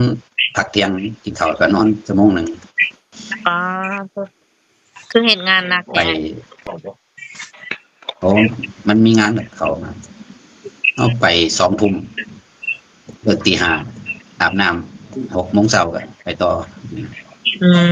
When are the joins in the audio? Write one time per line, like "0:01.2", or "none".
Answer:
none